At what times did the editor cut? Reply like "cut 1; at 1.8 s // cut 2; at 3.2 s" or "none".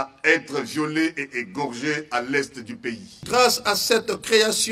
cut 1; at 3.2 s